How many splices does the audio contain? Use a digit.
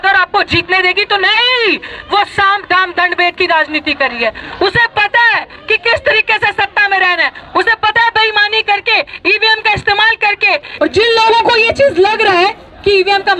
1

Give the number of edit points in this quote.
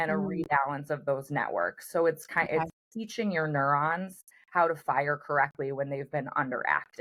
0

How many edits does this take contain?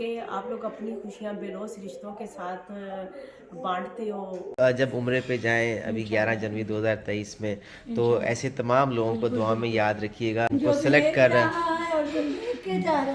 2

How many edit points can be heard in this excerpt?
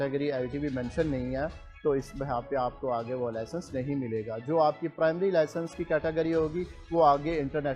0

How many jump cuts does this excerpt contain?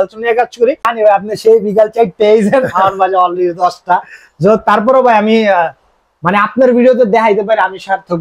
1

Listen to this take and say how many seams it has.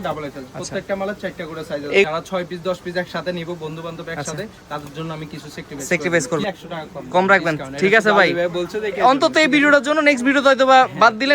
2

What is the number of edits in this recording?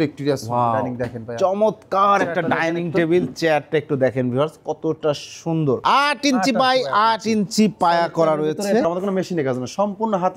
2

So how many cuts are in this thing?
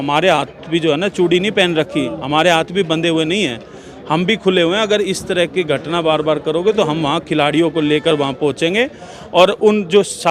0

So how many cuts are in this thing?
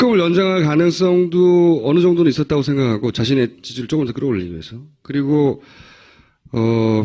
1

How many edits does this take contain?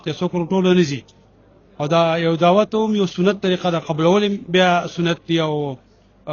0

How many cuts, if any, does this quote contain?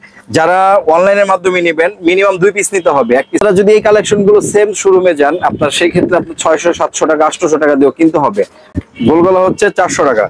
2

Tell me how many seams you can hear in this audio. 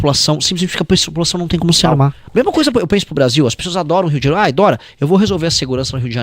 1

